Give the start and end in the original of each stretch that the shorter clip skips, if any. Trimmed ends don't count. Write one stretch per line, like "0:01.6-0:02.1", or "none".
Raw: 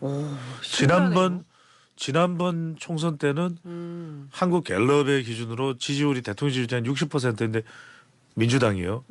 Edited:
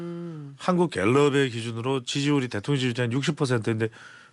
none

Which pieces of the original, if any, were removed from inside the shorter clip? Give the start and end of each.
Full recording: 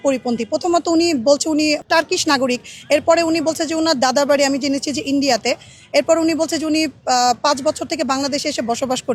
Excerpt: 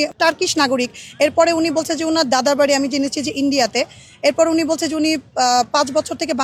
none

